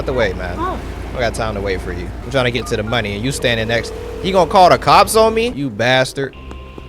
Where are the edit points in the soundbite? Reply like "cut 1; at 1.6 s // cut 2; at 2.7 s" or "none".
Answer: cut 1; at 2.2 s // cut 2; at 5.6 s